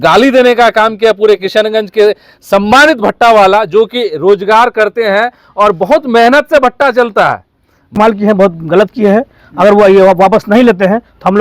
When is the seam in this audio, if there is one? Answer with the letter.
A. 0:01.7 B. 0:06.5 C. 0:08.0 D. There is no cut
C